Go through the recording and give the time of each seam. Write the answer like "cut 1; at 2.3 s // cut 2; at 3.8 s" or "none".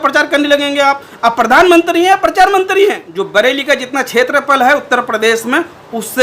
cut 1; at 3.1 s